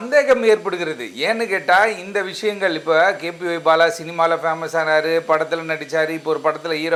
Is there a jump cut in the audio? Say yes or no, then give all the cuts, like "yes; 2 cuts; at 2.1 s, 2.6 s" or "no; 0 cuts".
no; 0 cuts